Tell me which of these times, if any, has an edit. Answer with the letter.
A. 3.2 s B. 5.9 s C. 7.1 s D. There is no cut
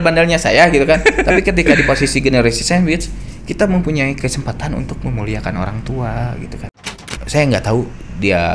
C